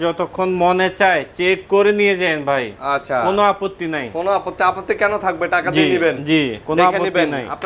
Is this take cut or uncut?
uncut